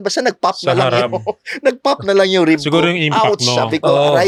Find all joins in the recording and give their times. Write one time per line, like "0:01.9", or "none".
none